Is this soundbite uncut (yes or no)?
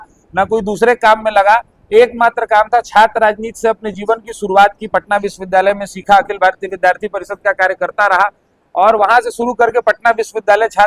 yes